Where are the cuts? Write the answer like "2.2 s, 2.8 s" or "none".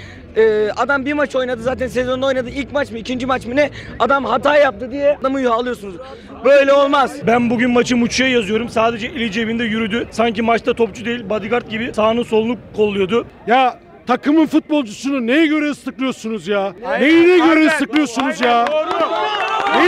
5.2 s, 7.1 s, 10.1 s, 11.9 s, 13.3 s, 16.8 s